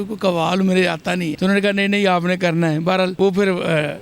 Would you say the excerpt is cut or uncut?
cut